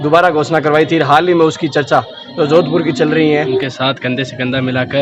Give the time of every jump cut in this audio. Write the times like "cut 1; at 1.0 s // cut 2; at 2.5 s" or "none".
cut 1; at 3.5 s